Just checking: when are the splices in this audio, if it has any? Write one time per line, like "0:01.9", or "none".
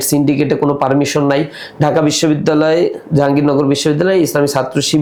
none